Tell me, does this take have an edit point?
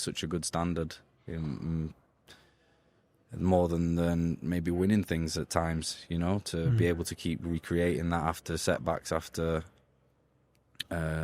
no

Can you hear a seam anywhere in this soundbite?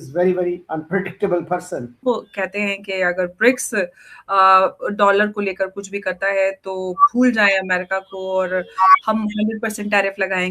yes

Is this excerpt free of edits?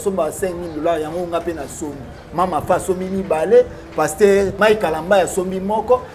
no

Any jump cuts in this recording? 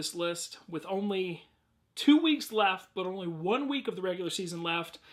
no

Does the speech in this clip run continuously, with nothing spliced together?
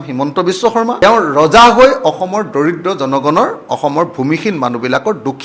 no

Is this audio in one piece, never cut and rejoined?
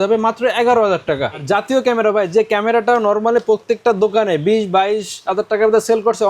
no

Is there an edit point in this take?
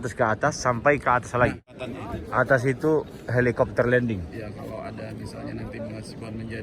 yes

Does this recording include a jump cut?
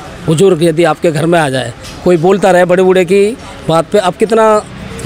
no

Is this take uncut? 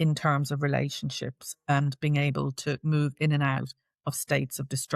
yes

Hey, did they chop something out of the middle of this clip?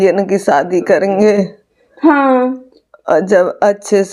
no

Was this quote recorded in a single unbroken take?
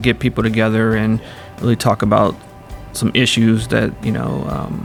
yes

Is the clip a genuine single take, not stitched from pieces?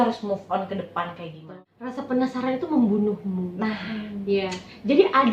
no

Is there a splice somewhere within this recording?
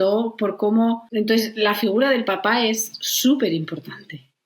yes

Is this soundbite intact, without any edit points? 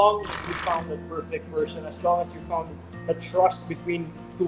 yes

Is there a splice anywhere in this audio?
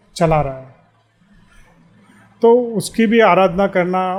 no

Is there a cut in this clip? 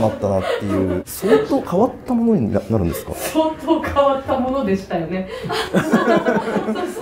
yes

